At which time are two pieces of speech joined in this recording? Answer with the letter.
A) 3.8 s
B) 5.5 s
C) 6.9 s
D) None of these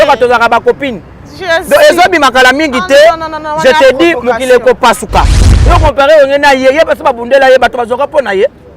B